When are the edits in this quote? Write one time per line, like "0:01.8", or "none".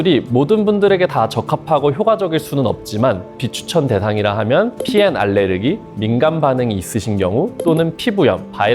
0:03.3